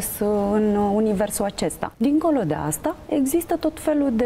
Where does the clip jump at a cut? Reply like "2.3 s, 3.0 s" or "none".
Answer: 1.8 s